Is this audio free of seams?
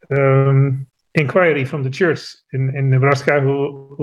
yes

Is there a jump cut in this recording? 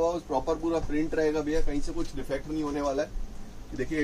no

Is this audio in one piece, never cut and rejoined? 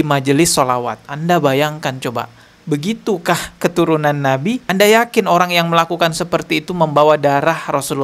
yes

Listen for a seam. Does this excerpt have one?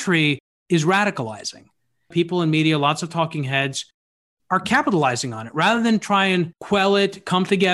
yes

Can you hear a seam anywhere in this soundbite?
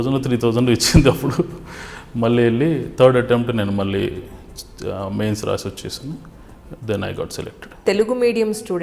yes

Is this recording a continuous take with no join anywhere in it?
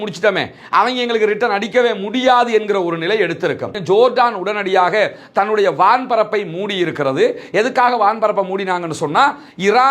no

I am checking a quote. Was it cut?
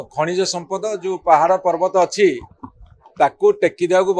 no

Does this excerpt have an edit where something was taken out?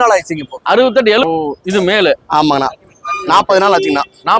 yes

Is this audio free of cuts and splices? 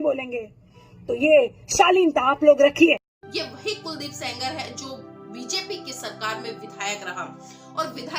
no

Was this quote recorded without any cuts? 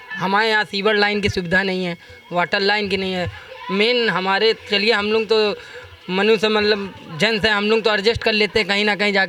yes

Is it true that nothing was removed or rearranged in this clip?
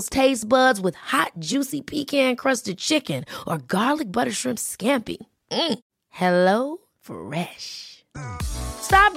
yes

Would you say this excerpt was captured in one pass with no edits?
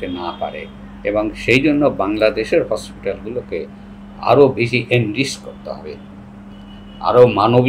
yes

